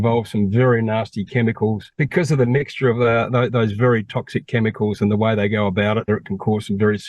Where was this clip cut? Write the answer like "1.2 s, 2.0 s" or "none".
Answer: 1.9 s, 6.1 s